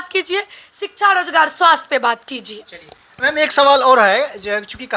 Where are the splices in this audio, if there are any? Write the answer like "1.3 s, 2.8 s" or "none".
none

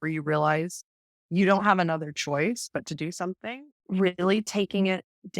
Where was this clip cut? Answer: 3.4 s

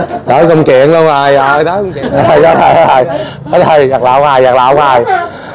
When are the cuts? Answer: 1.8 s

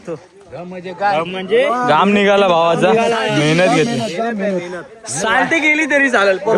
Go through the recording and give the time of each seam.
none

